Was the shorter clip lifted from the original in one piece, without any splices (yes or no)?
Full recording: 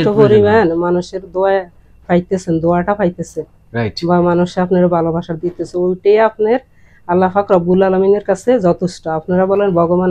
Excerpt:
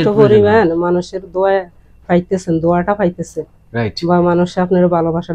yes